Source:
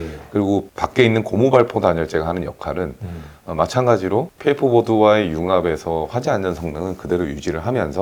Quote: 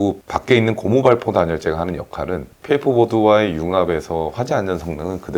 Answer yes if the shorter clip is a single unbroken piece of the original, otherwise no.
no